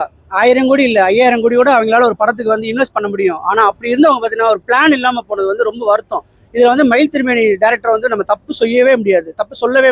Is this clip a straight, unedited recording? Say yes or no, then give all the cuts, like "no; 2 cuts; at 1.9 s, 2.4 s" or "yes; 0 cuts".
yes; 0 cuts